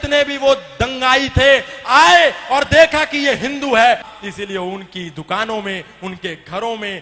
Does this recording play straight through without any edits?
no; 1 cut; at 4.1 s

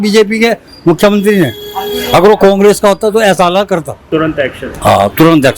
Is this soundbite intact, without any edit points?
no; 1 cut; at 4.0 s

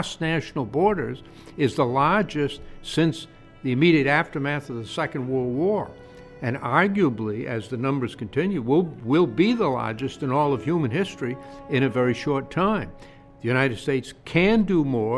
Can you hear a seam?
no; 0 cuts

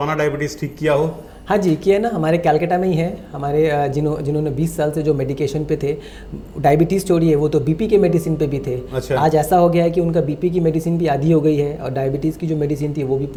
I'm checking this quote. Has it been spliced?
no; 0 cuts

